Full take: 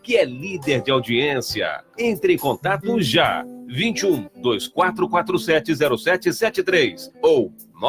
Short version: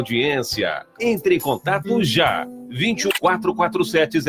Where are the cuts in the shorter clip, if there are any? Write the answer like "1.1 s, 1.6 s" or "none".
3.1 s